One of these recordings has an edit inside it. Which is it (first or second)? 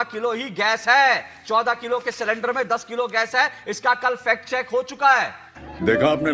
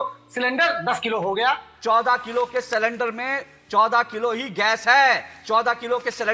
second